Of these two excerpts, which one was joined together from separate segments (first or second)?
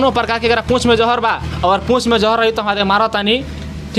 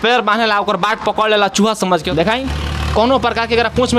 second